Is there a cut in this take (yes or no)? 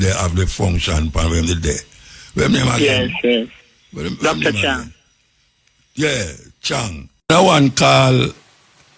yes